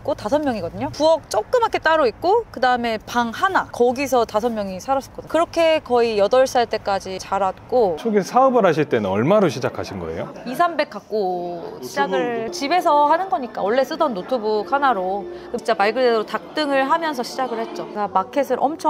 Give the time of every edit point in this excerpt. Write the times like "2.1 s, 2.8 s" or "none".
8.0 s, 12.5 s, 17.9 s